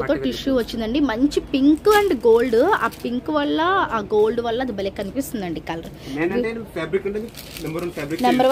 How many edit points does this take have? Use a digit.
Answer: 0